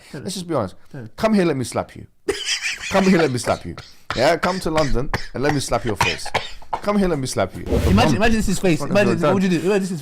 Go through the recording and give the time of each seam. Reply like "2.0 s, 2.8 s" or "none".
7.9 s